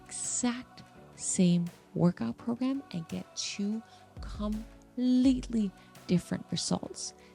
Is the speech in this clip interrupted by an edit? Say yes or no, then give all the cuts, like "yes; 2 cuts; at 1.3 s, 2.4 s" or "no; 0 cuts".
no; 0 cuts